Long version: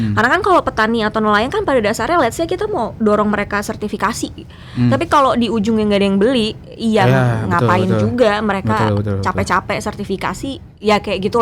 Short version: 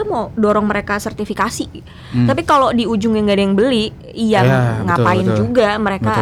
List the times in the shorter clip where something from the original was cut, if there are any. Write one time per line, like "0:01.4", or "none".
none